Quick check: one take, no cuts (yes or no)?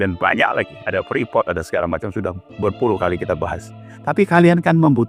yes